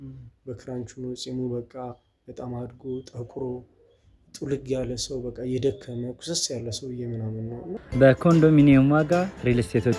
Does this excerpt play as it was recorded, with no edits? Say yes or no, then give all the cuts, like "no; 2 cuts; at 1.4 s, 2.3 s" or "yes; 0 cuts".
no; 1 cut; at 7.9 s